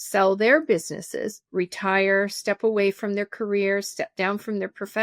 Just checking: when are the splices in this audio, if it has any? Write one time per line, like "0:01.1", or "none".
none